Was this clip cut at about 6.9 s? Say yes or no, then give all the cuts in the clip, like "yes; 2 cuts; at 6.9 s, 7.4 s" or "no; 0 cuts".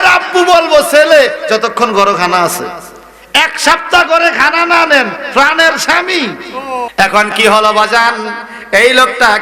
yes; 1 cut; at 6.9 s